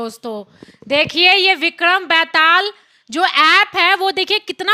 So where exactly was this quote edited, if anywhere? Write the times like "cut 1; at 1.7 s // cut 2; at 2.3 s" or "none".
none